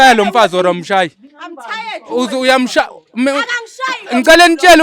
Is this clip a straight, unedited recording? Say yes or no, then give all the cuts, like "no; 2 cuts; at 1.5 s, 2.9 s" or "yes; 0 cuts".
yes; 0 cuts